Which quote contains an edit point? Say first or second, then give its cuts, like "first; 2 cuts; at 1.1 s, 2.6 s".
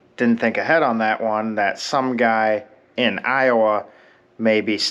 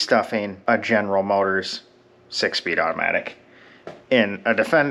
first; 1 cut; at 2.8 s